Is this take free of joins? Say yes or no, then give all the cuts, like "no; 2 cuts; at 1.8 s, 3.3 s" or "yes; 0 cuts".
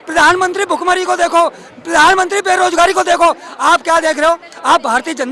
yes; 0 cuts